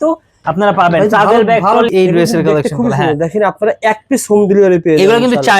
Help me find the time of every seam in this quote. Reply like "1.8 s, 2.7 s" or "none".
1.9 s